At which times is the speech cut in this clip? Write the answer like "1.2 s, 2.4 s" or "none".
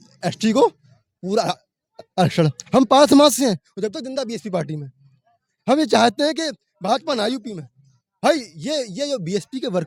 none